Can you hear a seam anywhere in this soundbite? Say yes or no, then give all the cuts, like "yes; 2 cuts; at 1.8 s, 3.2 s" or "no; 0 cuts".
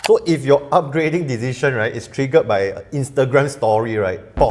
no; 0 cuts